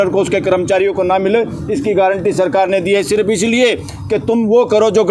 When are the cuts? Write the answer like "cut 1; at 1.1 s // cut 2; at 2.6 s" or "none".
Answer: none

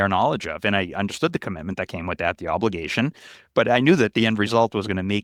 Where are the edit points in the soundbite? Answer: none

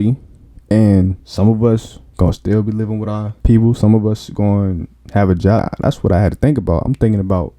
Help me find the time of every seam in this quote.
cut 1; at 1.2 s // cut 2; at 2.0 s // cut 3; at 3.3 s // cut 4; at 5.6 s

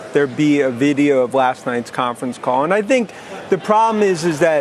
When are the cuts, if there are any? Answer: none

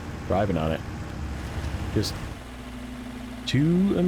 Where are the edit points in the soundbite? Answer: cut 1; at 2.3 s

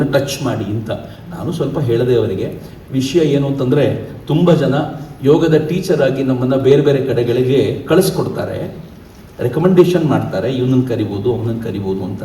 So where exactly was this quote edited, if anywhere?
none

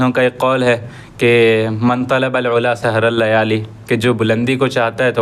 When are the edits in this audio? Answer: none

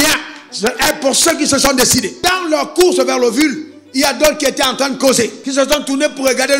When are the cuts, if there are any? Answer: cut 1; at 2.1 s // cut 2; at 5.4 s

